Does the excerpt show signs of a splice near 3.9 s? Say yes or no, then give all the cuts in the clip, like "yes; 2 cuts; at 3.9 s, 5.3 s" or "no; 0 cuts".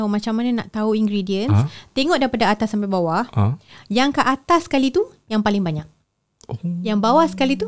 no; 0 cuts